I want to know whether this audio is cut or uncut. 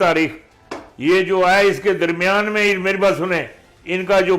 uncut